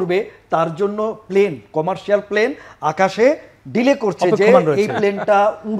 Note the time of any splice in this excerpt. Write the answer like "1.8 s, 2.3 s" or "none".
none